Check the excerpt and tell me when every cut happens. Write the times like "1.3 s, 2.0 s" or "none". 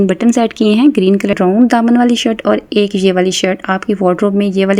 1.4 s